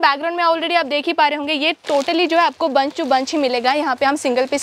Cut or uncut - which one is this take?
uncut